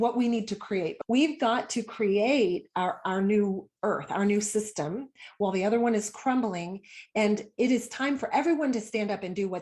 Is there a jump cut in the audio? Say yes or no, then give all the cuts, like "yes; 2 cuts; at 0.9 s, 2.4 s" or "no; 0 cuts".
yes; 1 cut; at 1.0 s